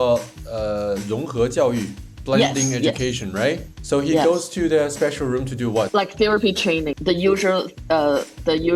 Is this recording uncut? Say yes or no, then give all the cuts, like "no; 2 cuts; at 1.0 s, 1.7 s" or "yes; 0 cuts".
no; 2 cuts; at 3.7 s, 5.9 s